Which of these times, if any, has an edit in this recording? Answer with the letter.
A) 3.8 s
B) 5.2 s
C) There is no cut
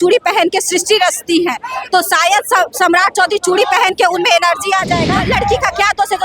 B